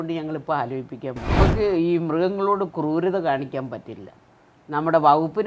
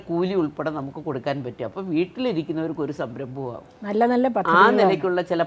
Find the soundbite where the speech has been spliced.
first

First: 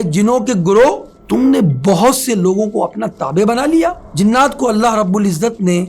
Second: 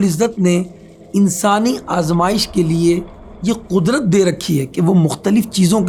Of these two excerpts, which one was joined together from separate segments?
first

